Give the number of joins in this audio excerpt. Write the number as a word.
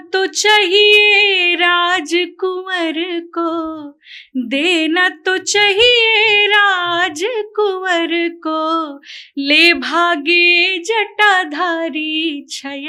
zero